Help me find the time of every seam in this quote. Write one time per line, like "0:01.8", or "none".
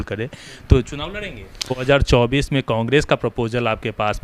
0:01.8